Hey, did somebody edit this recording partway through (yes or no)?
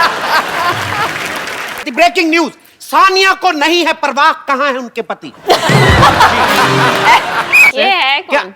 yes